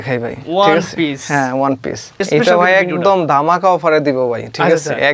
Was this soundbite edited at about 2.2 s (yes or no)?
yes